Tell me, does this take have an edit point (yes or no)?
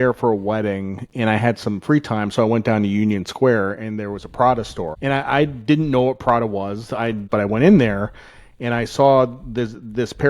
yes